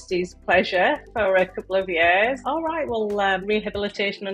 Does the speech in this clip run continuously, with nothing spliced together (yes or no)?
no